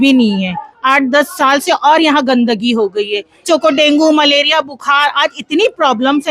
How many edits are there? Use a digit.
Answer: 1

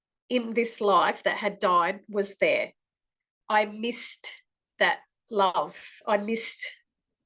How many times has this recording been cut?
1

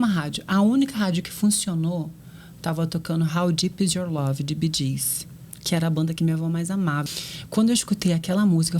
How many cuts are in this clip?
1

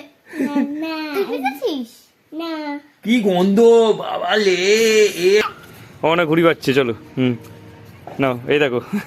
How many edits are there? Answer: 1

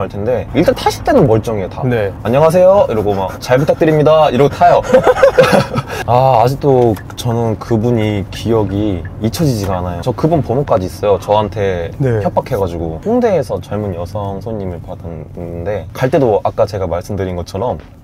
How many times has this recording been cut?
4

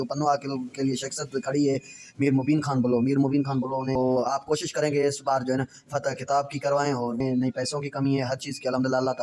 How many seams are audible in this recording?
2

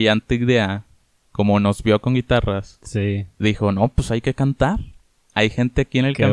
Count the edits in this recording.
0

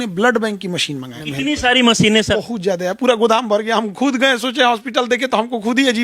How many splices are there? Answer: 2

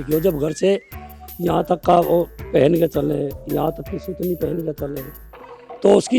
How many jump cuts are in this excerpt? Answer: 0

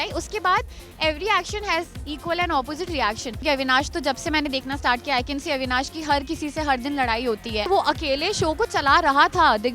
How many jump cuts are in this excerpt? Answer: 2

